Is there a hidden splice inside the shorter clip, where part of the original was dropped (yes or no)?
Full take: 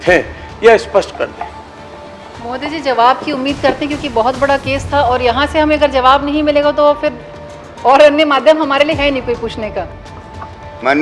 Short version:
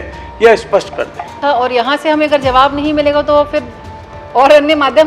yes